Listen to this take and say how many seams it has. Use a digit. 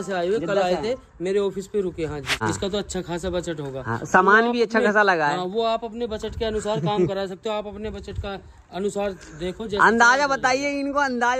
1